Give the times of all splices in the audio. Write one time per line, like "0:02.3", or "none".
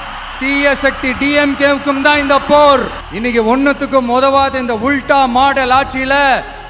0:03.0